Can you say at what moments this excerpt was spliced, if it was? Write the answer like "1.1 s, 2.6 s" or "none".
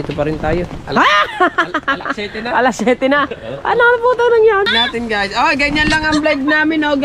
4.7 s